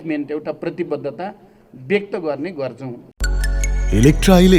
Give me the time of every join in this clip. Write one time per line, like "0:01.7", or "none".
0:03.0